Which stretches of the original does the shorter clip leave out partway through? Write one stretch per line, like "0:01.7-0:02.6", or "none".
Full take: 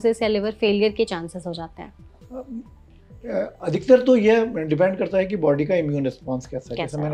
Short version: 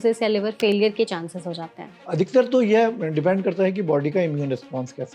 0:02.0-0:03.5